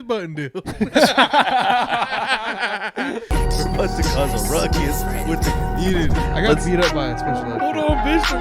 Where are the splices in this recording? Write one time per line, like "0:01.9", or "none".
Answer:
0:03.3